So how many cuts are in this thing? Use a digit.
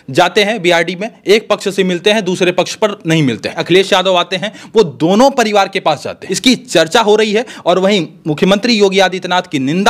2